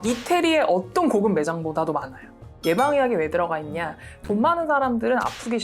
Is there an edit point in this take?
yes; 1 cut; at 2.4 s

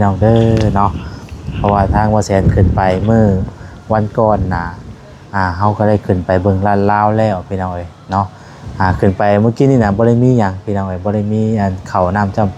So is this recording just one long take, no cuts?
yes; 0 cuts

